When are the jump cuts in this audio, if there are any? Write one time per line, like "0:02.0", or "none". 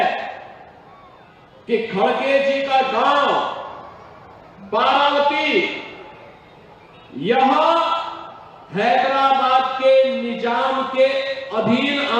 none

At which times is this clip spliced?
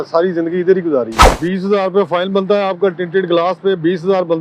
0:01.2

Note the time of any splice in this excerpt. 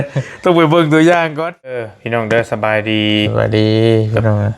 0:02.0

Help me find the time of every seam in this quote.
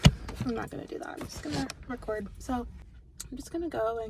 0:02.8

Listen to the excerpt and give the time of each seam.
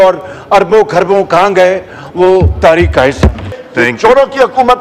0:03.4

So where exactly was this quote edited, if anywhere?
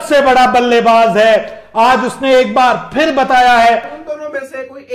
0:04.0

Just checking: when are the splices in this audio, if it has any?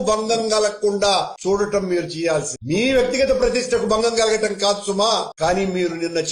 none

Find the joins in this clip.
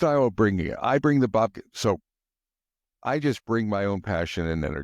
none

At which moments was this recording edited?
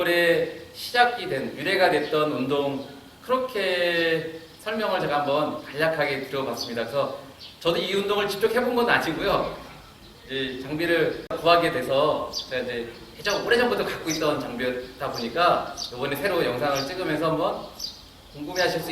0:11.4

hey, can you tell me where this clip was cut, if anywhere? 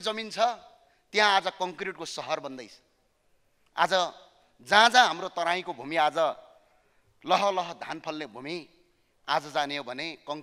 none

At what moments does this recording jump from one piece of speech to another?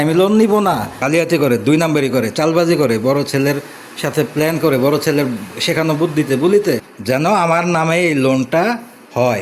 0:00.9
0:06.9

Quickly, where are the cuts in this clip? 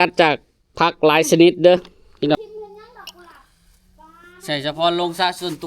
0:02.4

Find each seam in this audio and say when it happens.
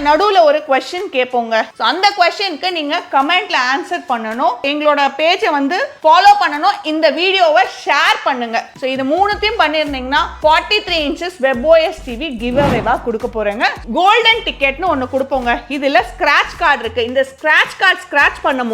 0:01.7
0:13.8

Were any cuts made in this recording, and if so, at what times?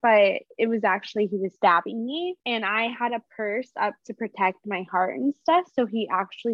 0:00.9
0:02.4

